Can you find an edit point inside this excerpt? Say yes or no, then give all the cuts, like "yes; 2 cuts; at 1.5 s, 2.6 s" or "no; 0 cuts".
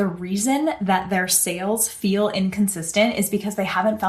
no; 0 cuts